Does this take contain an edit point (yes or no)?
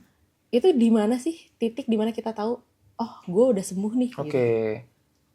no